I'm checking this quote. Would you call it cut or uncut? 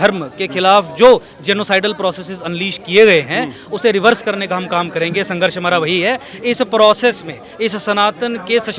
uncut